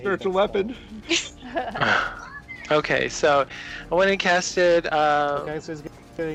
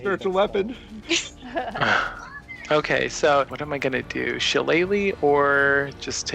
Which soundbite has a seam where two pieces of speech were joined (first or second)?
second